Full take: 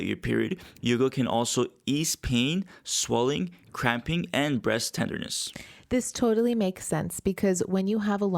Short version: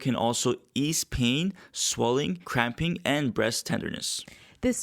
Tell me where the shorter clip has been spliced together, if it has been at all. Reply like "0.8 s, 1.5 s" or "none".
2.4 s

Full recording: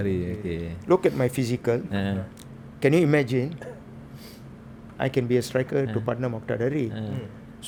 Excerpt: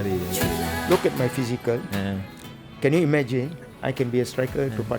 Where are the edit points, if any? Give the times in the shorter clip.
3.6 s

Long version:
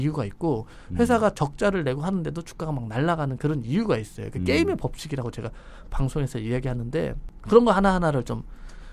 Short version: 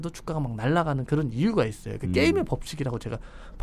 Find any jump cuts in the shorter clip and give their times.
none

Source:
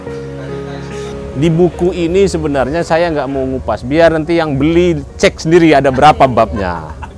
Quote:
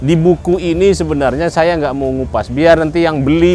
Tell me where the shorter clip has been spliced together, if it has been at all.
none

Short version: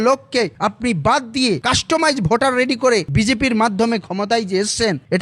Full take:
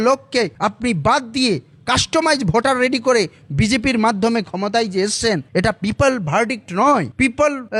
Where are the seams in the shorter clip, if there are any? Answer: 1.6 s, 3.1 s

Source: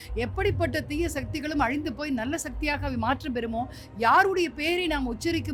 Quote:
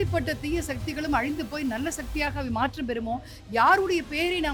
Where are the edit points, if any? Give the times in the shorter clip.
none

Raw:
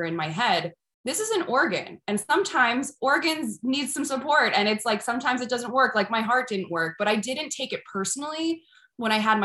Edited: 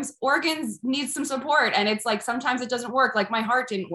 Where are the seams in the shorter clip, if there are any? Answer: none

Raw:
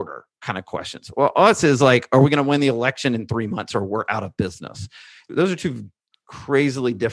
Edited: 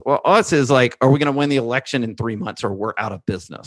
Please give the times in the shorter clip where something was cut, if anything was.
none

